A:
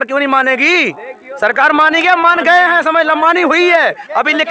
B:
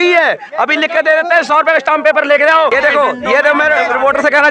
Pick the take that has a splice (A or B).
B